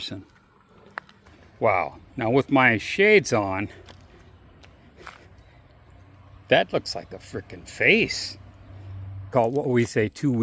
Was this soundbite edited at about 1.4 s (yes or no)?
yes